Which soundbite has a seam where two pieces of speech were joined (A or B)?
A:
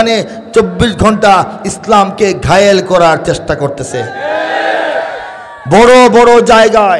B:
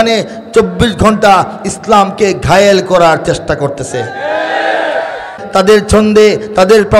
B